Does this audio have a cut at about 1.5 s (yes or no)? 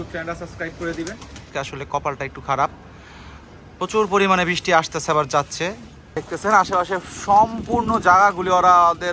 yes